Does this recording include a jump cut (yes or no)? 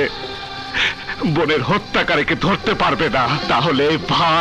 yes